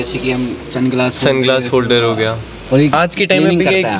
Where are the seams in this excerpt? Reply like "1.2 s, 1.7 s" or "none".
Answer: 2.9 s